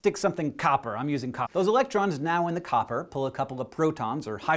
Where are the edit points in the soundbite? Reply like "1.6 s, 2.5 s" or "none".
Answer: none